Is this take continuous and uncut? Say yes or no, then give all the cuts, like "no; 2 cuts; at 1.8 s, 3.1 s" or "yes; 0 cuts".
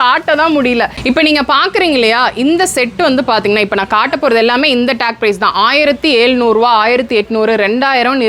no; 1 cut; at 1.0 s